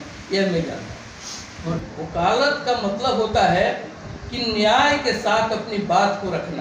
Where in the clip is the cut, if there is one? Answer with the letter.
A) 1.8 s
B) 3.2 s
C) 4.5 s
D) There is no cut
A